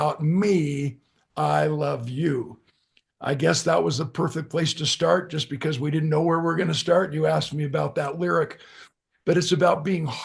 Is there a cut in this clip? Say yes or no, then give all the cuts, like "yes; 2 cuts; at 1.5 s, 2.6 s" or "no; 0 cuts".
no; 0 cuts